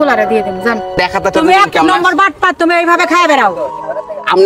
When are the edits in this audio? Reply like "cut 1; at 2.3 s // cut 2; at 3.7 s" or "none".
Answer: cut 1; at 1.0 s